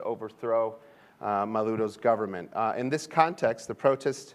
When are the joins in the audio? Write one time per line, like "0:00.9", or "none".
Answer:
0:02.9